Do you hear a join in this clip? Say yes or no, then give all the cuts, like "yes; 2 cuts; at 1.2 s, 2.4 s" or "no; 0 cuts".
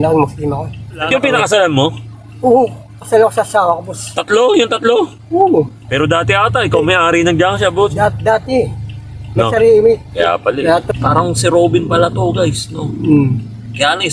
yes; 3 cuts; at 1.1 s, 5.8 s, 10.8 s